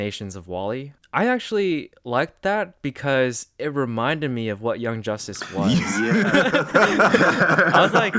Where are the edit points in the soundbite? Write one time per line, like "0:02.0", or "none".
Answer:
0:01.0